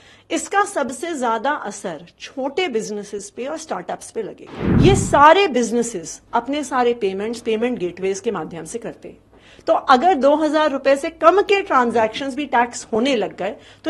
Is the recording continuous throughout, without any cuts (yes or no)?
no